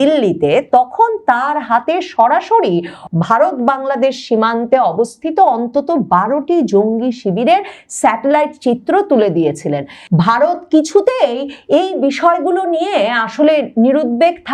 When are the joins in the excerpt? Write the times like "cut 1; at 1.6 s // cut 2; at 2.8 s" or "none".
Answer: cut 1; at 3.0 s